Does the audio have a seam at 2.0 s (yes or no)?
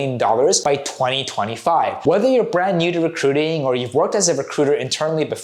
yes